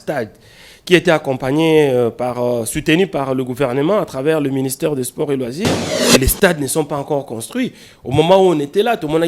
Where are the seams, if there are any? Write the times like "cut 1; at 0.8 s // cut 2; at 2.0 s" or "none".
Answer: cut 1; at 5.9 s

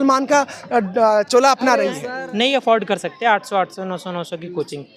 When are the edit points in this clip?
cut 1; at 2.1 s

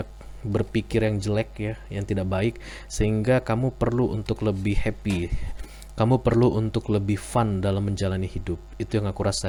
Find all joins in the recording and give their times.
none

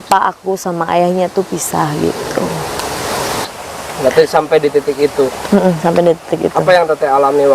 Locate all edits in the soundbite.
cut 1; at 3.4 s

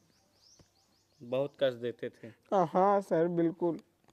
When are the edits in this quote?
none

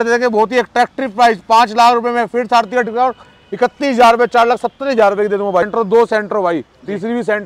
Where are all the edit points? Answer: cut 1; at 5.7 s

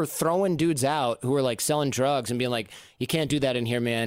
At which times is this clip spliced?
none

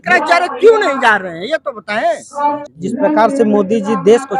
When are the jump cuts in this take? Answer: cut 1; at 2.6 s

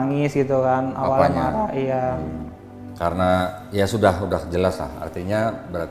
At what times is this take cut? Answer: cut 1; at 2.8 s

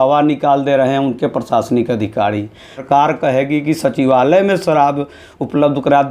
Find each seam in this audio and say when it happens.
cut 1; at 2.8 s

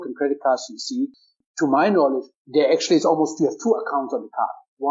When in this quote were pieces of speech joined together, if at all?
cut 1; at 1.3 s // cut 2; at 2.3 s

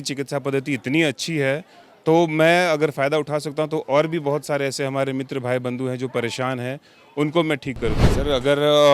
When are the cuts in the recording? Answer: cut 1; at 8.0 s

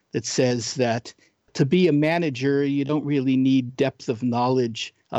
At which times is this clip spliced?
cut 1; at 1.5 s

